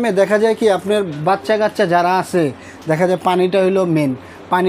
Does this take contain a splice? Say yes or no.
no